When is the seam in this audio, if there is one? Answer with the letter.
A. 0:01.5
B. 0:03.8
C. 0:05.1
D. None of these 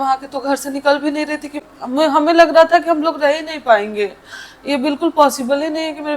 A